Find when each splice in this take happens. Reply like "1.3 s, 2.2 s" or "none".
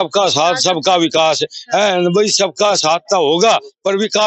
none